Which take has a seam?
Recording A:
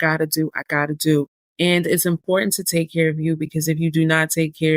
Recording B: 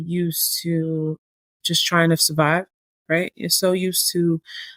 A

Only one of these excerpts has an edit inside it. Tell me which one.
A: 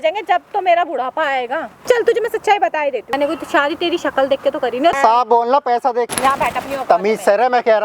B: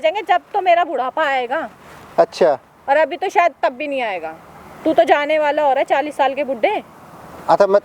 A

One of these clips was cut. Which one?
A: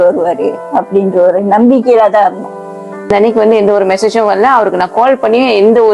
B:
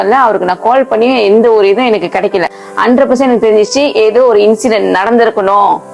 A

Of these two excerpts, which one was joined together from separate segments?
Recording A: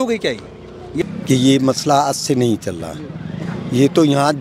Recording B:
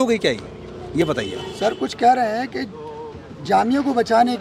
A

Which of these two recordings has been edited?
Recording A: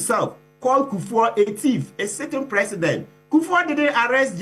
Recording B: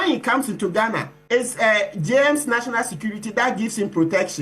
B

